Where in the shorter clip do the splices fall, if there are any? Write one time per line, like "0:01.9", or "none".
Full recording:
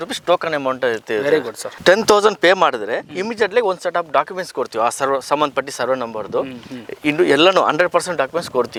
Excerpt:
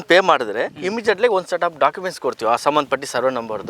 0:02.6